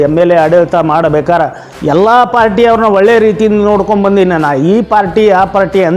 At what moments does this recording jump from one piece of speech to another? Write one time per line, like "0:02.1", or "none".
none